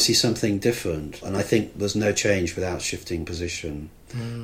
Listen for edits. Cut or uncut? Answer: cut